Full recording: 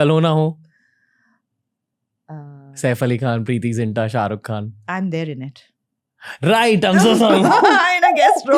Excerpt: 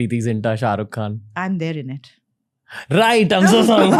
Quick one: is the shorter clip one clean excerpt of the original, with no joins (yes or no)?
yes